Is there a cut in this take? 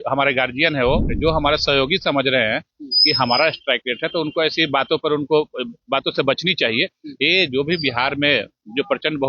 yes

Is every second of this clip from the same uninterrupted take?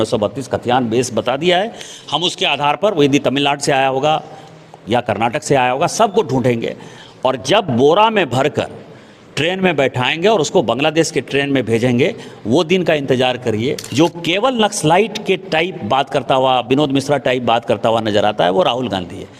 no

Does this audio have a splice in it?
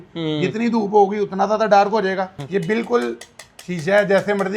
yes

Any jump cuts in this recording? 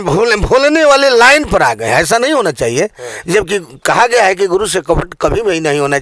no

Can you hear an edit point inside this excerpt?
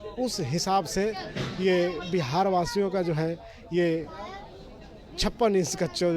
no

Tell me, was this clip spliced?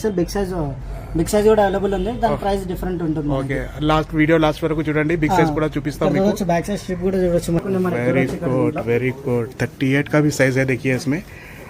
yes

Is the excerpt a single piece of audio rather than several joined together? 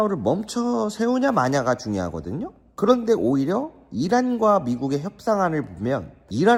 yes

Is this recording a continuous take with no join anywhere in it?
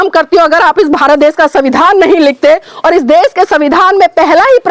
yes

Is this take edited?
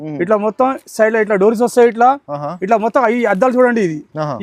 no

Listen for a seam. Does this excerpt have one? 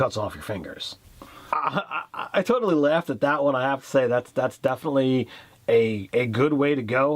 yes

